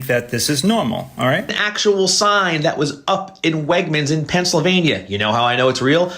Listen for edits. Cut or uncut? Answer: cut